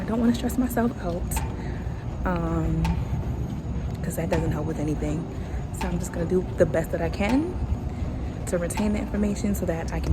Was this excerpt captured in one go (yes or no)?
yes